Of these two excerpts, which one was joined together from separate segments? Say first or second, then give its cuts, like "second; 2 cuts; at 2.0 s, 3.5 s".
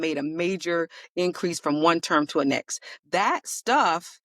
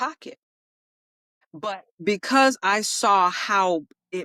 first; 1 cut; at 3.0 s